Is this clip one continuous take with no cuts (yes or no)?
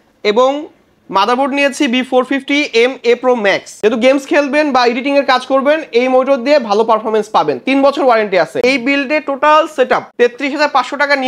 no